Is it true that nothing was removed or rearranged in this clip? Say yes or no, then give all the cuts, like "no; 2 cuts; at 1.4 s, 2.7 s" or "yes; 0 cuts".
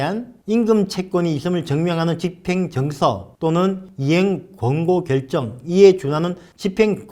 yes; 0 cuts